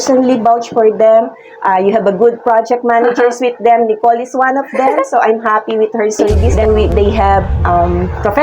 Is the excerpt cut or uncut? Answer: cut